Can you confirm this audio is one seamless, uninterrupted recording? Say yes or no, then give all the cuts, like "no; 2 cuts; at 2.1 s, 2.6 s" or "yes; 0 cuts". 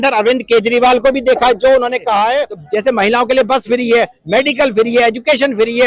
no; 1 cut; at 2.6 s